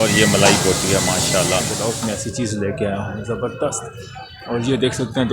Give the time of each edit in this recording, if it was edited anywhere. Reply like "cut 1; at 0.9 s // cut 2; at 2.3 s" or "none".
cut 1; at 1.8 s